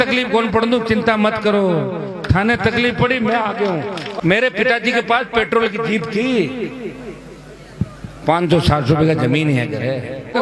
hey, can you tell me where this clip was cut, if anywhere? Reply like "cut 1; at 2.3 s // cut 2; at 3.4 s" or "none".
cut 1; at 4.2 s

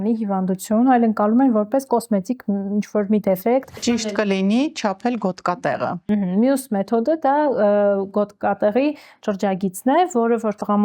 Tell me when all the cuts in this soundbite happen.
cut 1; at 4.2 s

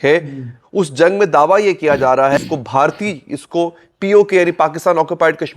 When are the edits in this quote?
cut 1; at 2.4 s

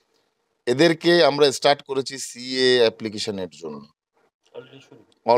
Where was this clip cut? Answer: none

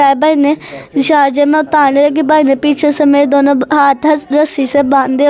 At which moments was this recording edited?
none

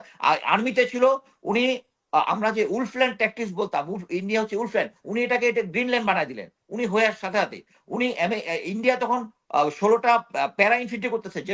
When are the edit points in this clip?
none

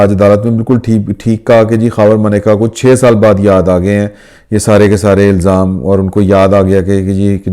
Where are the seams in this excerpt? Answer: none

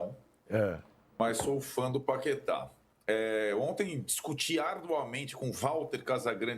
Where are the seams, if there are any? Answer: none

